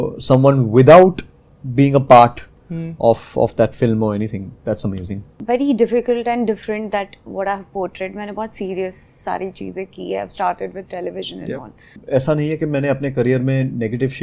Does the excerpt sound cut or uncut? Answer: cut